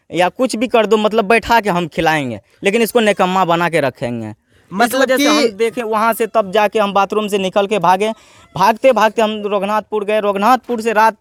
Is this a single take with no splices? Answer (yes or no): yes